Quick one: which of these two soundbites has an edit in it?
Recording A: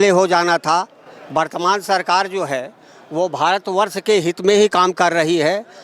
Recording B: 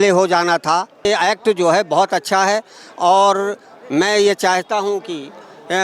B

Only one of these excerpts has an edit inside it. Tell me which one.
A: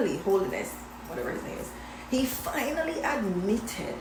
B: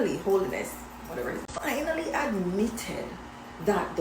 B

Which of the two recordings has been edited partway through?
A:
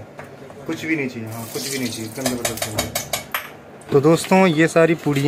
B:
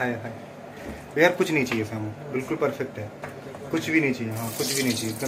A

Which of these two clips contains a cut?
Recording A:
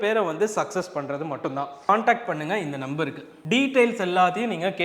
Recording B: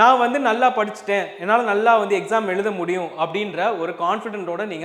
A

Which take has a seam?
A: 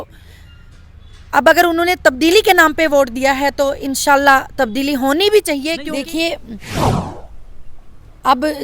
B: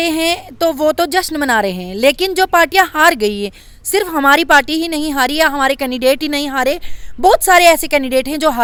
A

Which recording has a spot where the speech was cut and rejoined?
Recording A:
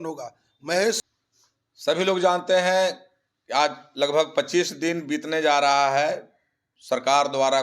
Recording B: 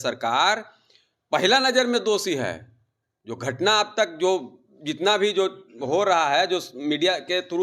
A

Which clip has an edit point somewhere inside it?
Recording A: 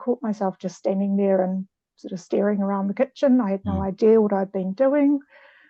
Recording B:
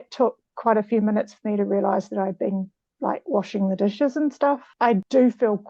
B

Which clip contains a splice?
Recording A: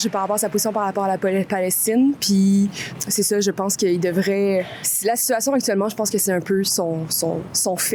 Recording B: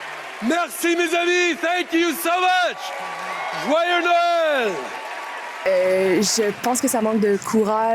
B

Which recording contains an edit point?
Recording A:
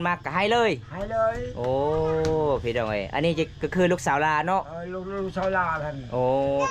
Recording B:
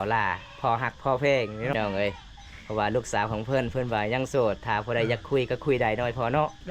B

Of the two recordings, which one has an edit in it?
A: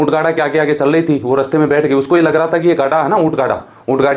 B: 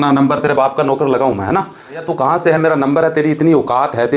B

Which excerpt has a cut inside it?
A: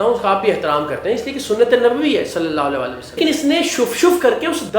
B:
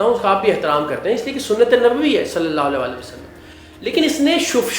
A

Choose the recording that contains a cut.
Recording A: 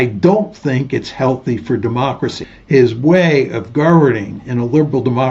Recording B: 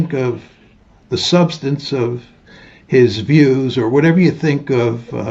A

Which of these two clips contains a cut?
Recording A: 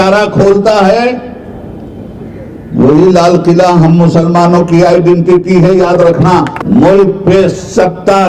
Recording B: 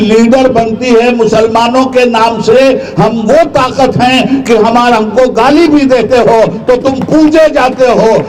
A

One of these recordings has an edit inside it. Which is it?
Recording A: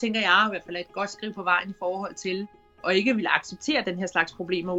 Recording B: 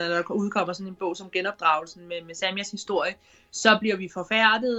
A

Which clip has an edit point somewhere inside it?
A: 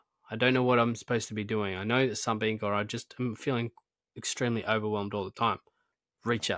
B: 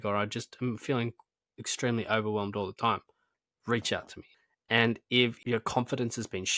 B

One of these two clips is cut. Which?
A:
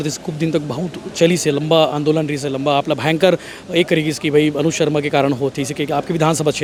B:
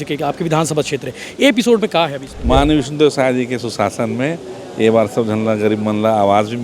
B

